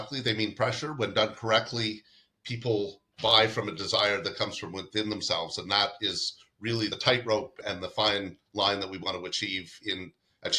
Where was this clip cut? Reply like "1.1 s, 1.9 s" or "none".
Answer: 6.9 s, 7.6 s